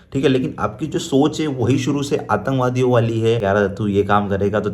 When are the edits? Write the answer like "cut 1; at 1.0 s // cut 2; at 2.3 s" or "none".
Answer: cut 1; at 3.4 s